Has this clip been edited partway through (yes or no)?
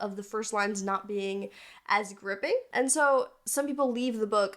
yes